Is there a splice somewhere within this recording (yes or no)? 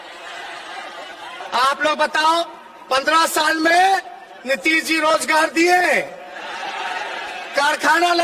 yes